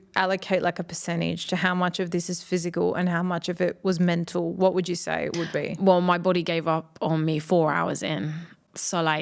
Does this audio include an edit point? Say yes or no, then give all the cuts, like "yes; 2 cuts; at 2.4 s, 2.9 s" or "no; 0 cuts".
no; 0 cuts